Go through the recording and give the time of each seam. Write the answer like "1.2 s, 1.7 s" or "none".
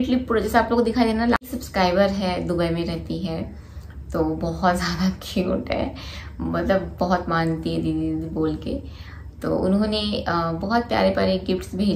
1.4 s